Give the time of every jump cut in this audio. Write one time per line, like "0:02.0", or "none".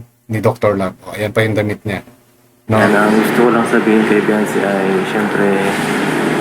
0:02.8